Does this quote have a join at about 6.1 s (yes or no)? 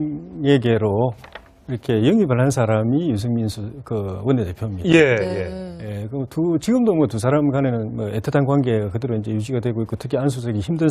no